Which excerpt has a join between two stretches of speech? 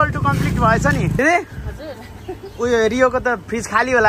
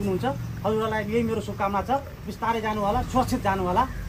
first; 1 cut; at 1.2 s

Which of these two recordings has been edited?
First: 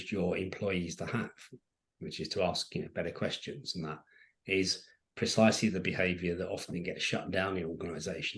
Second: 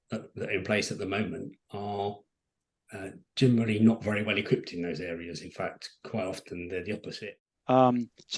second; 1 cut; at 7.1 s

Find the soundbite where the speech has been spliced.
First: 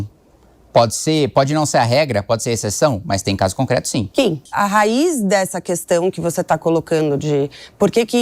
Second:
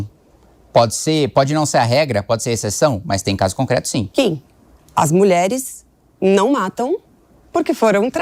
first; 1 cut; at 4.5 s

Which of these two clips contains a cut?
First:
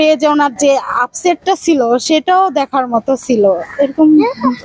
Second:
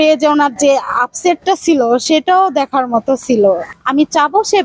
second; 1 cut; at 3.7 s

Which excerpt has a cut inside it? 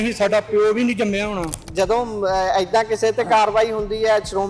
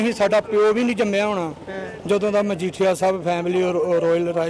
first; 1 cut; at 1.6 s

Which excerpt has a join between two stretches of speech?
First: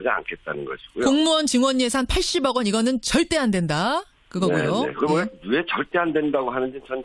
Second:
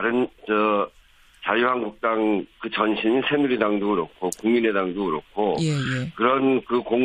second; 1 cut; at 4.4 s

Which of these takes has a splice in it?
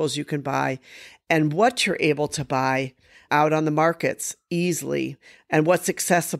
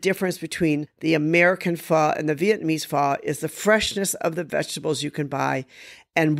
second; 1 cut; at 0.9 s

